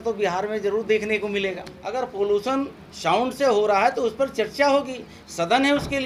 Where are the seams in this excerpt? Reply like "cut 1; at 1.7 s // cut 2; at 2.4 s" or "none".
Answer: cut 1; at 1.8 s